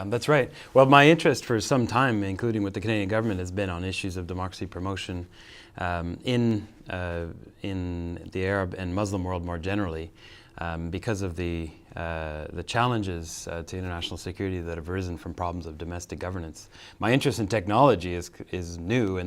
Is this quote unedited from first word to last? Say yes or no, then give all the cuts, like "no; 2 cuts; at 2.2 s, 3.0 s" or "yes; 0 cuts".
yes; 0 cuts